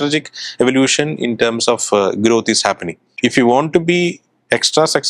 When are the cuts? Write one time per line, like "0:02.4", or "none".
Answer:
0:03.1